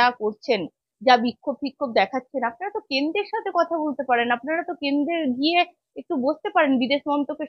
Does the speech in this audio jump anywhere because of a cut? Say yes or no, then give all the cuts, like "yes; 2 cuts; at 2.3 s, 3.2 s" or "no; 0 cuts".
no; 0 cuts